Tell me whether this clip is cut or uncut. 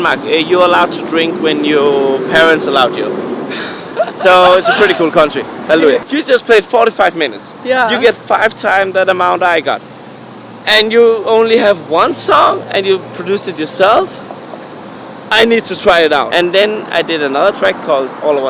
cut